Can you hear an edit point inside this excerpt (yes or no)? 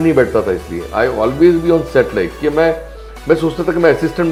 no